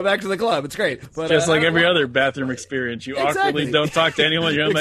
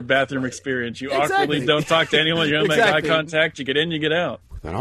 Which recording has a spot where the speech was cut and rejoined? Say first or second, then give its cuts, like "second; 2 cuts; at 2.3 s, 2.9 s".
first; 1 cut; at 1.1 s